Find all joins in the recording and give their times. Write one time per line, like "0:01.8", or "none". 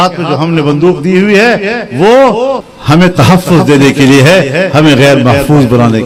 none